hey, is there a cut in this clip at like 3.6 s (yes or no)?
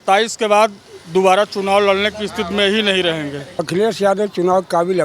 yes